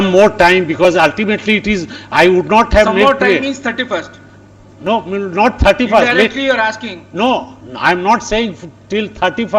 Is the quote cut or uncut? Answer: uncut